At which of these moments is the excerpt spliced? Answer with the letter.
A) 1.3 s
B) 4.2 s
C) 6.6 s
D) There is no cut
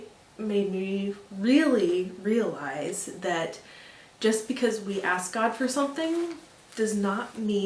D